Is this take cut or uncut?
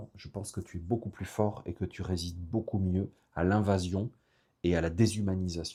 uncut